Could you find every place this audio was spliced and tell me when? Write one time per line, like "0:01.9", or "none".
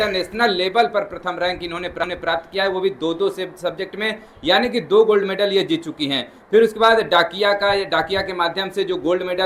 none